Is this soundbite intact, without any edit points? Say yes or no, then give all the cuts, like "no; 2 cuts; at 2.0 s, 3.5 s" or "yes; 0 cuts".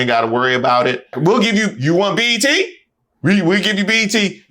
no; 1 cut; at 1.1 s